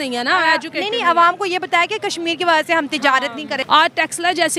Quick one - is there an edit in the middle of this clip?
no; 0 cuts

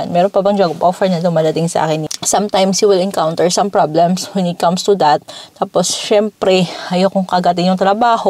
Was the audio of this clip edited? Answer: yes; 1 cut; at 2.1 s

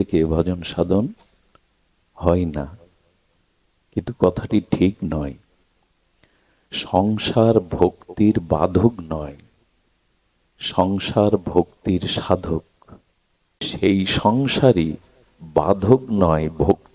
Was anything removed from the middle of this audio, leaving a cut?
yes; 1 cut; at 13.7 s

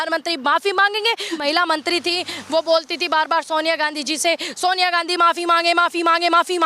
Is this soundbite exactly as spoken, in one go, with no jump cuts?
no; 1 cut; at 1.4 s

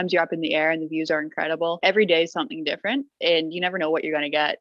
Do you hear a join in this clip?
yes; 1 cut; at 1.8 s

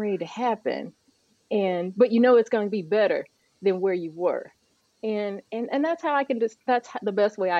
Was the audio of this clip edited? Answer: no; 0 cuts

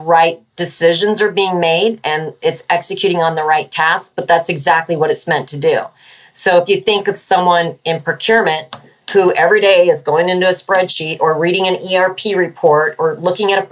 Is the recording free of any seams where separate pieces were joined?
yes; 0 cuts

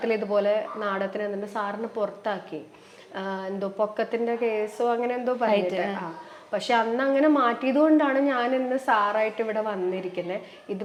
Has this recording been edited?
no; 0 cuts

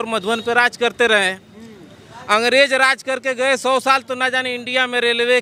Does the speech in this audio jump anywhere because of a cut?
no; 0 cuts

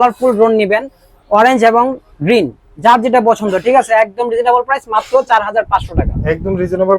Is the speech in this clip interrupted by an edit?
no; 0 cuts

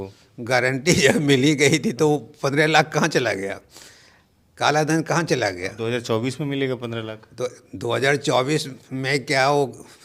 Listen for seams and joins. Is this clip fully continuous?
yes; 0 cuts

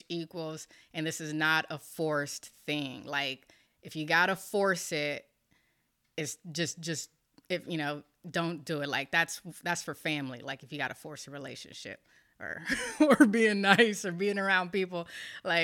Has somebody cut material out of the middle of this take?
no; 0 cuts

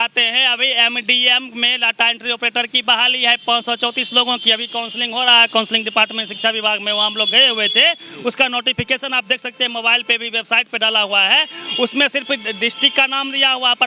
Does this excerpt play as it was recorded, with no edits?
yes; 0 cuts

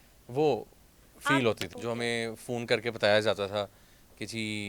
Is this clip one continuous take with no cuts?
no; 1 cut; at 1.7 s

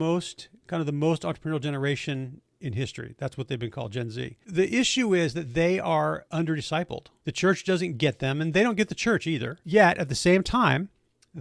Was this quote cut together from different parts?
yes; 4 cuts; at 4.4 s, 6.2 s, 7.1 s, 9.5 s

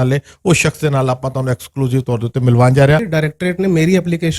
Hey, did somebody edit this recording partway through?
yes; 1 cut; at 3.1 s

